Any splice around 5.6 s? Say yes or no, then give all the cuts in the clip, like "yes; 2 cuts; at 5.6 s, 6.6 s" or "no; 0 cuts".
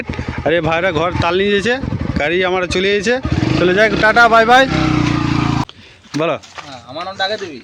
yes; 1 cut; at 5.6 s